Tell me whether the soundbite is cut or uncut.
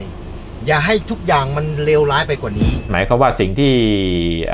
cut